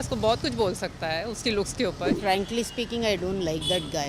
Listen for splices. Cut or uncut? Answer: cut